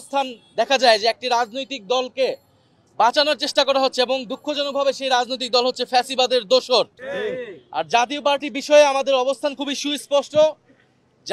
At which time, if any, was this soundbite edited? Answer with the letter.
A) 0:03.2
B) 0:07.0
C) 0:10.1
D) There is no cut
B